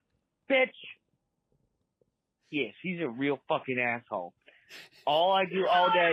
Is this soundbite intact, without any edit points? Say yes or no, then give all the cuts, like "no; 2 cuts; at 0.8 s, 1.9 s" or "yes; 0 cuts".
yes; 0 cuts